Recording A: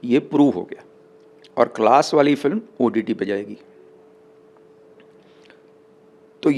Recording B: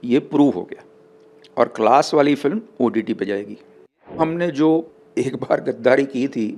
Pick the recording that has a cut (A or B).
B